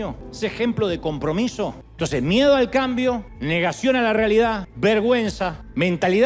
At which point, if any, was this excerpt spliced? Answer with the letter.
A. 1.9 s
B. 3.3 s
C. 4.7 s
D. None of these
A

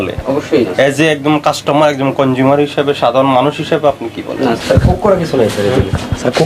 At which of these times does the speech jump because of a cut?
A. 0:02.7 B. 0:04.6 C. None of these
B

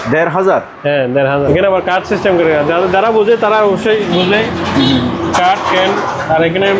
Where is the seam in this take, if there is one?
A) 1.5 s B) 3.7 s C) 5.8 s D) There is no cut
A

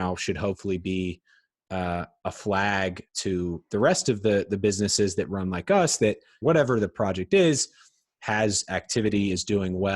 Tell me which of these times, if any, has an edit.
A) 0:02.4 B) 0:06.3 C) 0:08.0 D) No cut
B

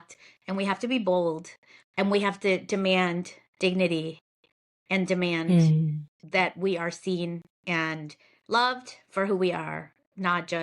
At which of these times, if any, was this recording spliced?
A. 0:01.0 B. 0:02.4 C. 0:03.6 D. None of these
D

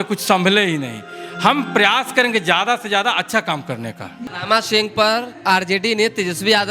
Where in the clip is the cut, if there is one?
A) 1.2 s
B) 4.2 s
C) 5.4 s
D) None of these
B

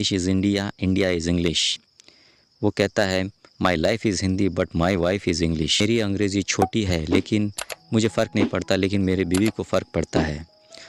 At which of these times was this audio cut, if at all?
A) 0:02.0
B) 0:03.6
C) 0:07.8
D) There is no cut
D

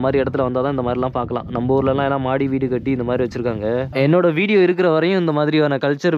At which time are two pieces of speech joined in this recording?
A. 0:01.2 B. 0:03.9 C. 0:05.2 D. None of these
B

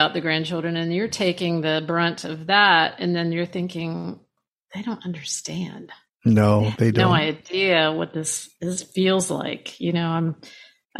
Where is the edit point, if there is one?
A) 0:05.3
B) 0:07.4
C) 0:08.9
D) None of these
D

